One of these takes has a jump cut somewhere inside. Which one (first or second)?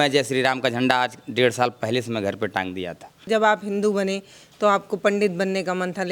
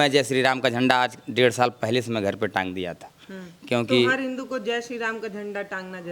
first